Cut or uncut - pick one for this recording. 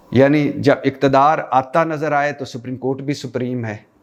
uncut